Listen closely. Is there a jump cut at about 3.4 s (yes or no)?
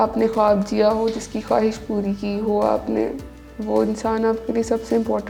no